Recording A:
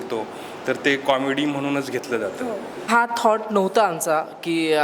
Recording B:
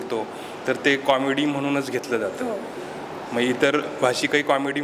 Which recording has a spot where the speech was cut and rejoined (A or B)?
A